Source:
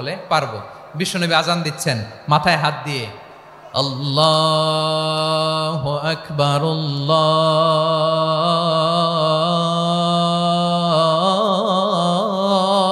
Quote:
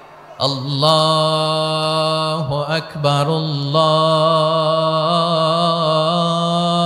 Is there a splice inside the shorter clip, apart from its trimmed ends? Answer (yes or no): no